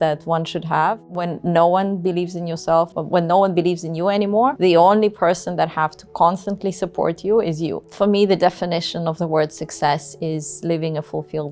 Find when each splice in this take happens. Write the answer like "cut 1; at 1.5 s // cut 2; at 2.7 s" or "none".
cut 1; at 7.8 s